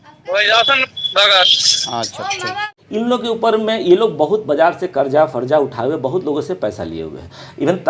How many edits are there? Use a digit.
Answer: 1